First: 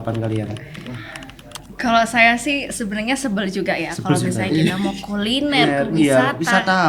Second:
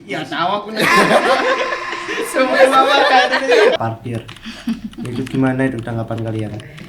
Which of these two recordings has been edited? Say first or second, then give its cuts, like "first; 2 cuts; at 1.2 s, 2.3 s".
second; 1 cut; at 3.7 s